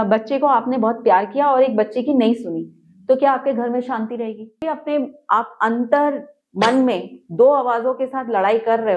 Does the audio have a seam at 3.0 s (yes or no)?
no